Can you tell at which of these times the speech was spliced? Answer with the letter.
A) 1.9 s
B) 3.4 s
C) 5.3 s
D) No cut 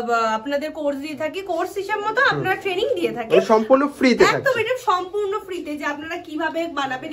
D